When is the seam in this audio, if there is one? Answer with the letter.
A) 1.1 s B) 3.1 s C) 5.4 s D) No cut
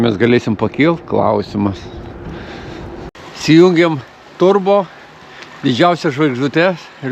B